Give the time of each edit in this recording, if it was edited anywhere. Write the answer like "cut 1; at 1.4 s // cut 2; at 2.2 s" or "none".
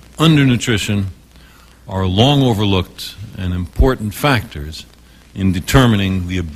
cut 1; at 2.4 s

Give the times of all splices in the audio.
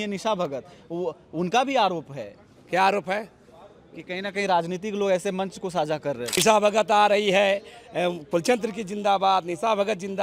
cut 1; at 6.4 s

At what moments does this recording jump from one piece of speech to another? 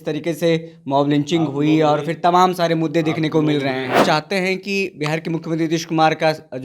cut 1; at 4.0 s

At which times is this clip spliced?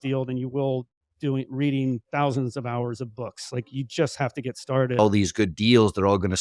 cut 1; at 5.0 s

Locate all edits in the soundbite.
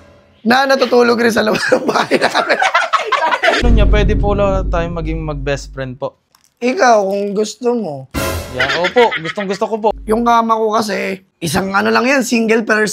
cut 1; at 3.6 s // cut 2; at 6.3 s // cut 3; at 9.9 s

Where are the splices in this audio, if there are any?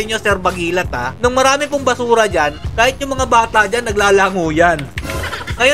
none

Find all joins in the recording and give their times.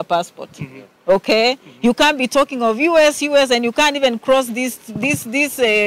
none

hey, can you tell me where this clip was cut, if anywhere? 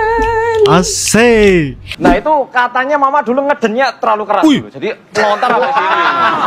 cut 1; at 1.8 s

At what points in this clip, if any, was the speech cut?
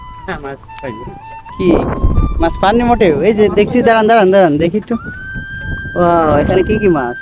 none

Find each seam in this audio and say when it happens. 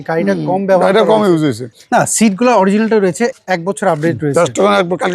cut 1; at 1.7 s // cut 2; at 3.4 s

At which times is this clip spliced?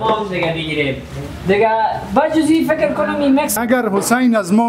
cut 1; at 3.5 s

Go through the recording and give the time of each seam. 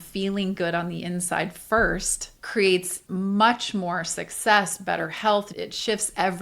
cut 1; at 3.0 s // cut 2; at 5.5 s

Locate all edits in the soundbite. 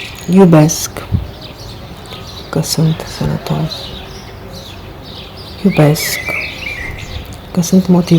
cut 1; at 3.8 s // cut 2; at 5.6 s // cut 3; at 6.0 s // cut 4; at 7.5 s

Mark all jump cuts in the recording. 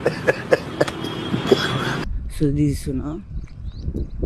cut 1; at 2.1 s

